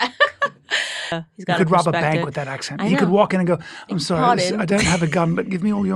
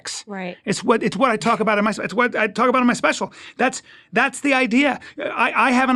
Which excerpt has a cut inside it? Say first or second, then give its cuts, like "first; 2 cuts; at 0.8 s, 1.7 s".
first; 1 cut; at 1.1 s